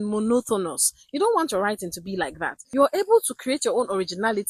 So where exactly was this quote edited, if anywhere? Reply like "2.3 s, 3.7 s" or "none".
2.5 s